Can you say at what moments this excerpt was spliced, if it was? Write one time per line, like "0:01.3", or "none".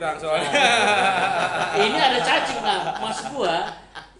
none